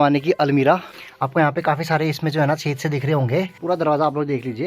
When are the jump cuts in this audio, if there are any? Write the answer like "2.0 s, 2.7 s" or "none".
1.0 s, 3.6 s